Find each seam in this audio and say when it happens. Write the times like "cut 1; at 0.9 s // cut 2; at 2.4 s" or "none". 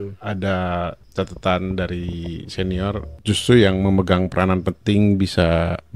cut 1; at 1.0 s // cut 2; at 3.1 s